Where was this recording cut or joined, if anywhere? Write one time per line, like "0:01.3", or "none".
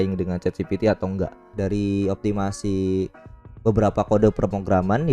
0:01.5